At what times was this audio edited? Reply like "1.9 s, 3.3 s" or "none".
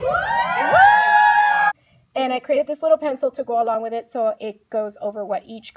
1.7 s